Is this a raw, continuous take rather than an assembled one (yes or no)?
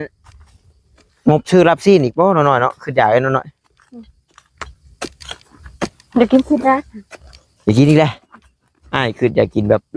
yes